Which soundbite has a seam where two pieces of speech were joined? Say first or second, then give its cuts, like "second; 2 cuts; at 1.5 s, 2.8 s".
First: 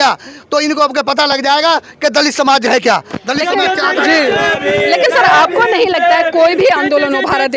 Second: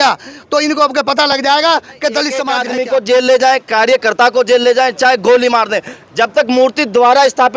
second; 1 cut; at 2.5 s